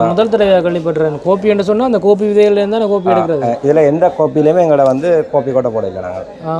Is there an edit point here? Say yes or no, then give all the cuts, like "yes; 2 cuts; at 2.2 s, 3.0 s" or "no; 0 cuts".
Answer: no; 0 cuts